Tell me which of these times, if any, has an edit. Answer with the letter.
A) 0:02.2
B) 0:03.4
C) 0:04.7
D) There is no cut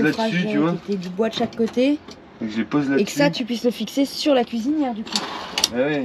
D